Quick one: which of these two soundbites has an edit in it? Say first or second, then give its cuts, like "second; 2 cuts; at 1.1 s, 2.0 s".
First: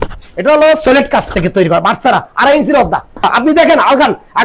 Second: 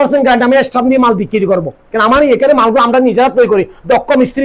first; 1 cut; at 3.3 s